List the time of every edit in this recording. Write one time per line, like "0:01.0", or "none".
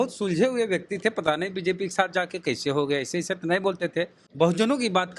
0:04.2